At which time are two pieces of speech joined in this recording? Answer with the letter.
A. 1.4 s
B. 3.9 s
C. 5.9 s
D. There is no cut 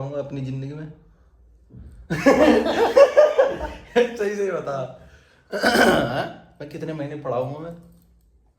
D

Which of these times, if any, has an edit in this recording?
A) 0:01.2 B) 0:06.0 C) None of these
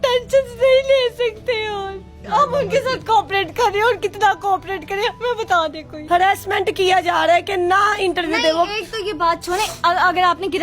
B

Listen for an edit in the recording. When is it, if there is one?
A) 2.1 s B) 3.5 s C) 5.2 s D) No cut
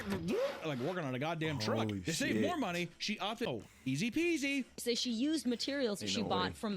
B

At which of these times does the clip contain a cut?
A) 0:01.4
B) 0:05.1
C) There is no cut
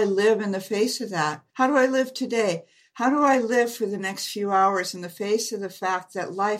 A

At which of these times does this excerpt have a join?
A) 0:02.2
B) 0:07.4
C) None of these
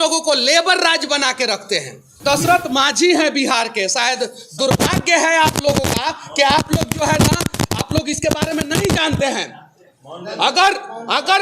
A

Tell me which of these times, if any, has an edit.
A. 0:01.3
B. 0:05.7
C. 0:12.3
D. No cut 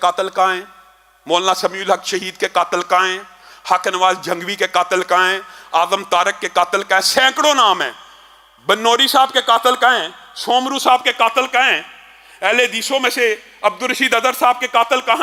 D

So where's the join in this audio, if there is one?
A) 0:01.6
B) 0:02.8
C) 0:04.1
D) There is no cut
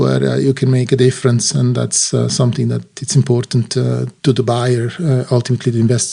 C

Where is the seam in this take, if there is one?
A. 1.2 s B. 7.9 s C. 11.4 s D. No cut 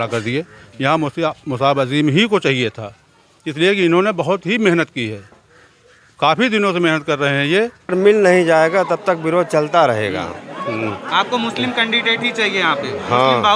B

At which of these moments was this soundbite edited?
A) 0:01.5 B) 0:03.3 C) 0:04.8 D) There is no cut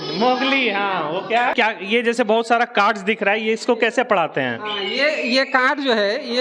A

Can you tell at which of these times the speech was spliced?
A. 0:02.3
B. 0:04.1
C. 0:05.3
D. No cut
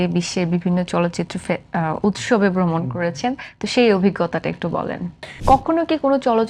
C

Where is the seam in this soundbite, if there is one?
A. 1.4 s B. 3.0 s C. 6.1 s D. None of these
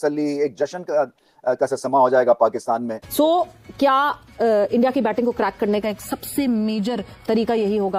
B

